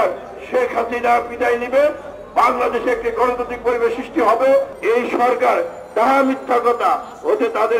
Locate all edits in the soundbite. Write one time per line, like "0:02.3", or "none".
0:04.7